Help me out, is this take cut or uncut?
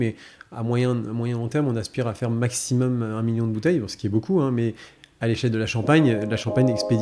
uncut